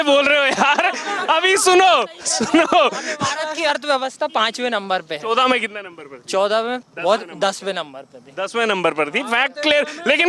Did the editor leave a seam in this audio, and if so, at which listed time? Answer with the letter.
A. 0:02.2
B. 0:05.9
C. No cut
C